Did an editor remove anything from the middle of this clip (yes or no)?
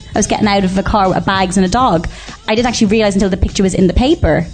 yes